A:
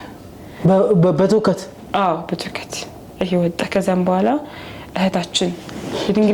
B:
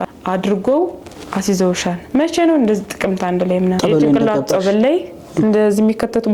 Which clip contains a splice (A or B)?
B